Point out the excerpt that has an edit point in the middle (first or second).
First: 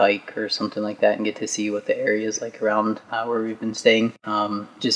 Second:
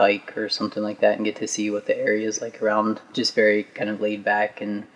second